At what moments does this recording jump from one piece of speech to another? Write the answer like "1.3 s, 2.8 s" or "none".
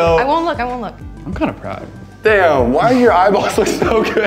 1.0 s, 2.0 s